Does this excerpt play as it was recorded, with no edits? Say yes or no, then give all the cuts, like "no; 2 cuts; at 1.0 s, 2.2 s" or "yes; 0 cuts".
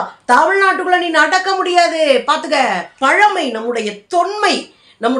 no; 1 cut; at 2.9 s